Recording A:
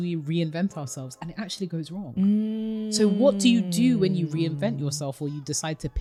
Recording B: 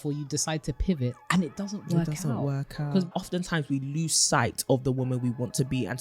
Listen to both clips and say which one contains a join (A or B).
B